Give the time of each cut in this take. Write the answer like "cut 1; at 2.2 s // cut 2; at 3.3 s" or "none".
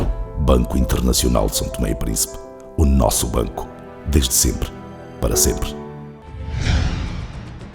cut 1; at 6.2 s